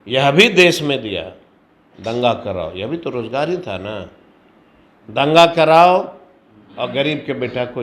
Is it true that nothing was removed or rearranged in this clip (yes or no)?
yes